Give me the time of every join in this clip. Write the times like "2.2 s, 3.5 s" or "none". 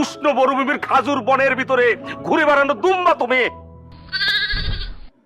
none